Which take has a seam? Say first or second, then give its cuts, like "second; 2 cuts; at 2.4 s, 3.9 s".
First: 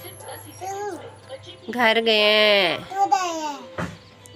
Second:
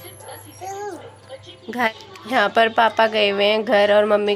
second; 1 cut; at 1.9 s